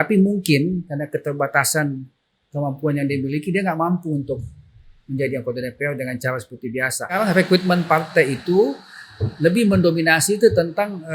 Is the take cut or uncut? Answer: cut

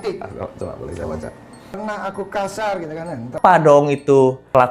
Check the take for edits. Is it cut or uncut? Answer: cut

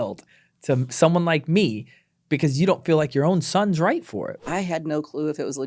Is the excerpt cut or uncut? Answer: cut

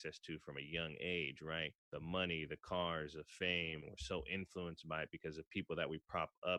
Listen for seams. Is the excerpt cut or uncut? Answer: cut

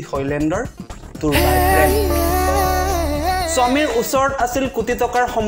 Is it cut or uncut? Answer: cut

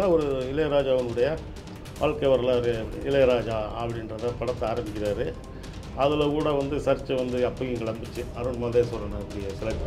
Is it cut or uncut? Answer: uncut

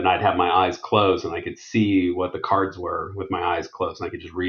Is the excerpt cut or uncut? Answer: uncut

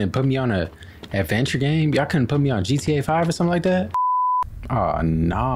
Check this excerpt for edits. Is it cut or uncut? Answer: cut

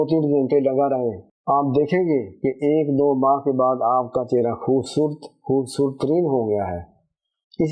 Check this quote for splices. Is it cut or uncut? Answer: cut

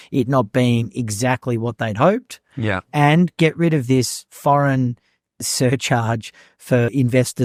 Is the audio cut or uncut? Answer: uncut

